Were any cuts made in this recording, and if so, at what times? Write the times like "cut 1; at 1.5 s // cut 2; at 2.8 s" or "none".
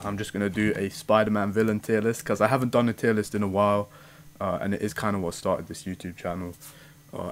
none